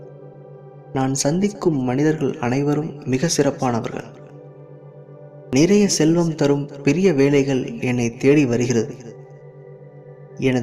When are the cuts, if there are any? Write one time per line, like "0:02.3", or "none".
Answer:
0:04.1
0:05.5